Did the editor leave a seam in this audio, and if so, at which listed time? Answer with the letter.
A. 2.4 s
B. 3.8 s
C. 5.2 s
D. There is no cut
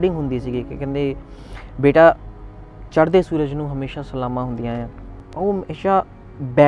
C